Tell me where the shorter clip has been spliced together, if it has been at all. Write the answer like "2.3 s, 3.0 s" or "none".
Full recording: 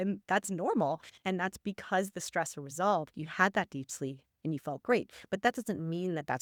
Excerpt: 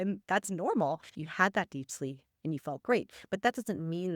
1.1 s